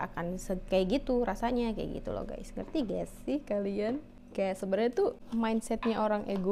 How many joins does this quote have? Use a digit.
2